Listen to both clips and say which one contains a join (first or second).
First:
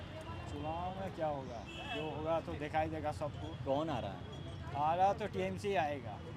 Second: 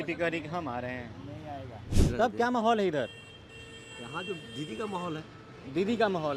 second